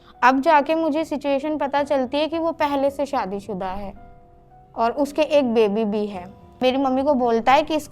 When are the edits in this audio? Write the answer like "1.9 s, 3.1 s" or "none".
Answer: 6.6 s